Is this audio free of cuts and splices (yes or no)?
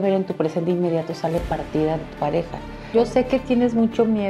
no